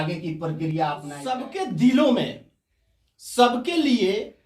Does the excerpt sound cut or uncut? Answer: cut